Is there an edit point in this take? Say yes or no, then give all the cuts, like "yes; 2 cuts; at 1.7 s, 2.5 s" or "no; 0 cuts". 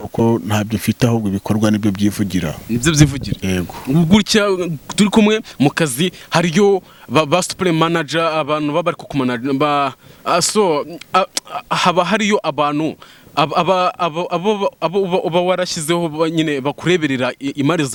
no; 0 cuts